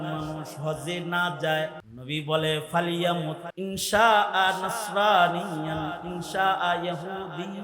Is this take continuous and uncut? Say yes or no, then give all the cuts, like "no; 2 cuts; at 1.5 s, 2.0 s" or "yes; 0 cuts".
no; 2 cuts; at 1.9 s, 3.5 s